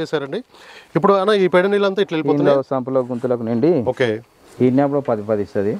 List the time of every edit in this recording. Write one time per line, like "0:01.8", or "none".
0:04.4